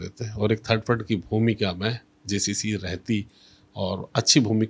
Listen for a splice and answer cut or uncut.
uncut